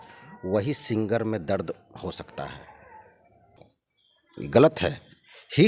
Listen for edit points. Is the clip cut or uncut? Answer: cut